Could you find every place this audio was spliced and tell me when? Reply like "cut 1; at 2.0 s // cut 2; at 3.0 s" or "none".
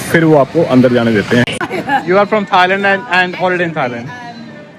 cut 1; at 1.5 s